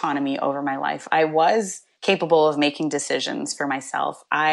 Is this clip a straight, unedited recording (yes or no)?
yes